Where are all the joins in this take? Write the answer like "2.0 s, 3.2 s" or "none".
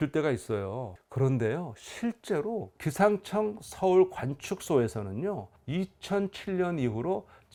none